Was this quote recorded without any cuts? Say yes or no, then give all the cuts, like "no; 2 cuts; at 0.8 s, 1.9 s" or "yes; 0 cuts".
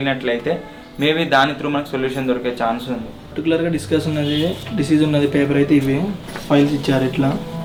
yes; 0 cuts